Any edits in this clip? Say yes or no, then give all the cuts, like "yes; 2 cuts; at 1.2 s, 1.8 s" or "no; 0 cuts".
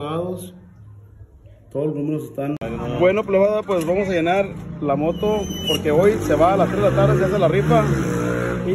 yes; 1 cut; at 2.9 s